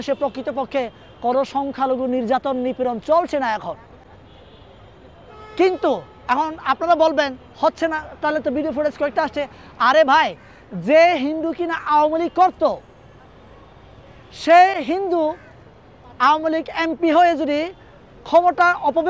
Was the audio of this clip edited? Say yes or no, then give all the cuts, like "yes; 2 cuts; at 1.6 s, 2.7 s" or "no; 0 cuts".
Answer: no; 0 cuts